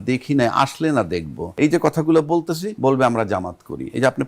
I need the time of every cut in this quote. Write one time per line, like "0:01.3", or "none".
0:01.4
0:02.7